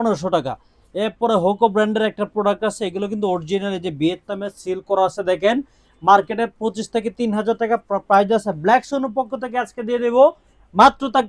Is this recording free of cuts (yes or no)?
yes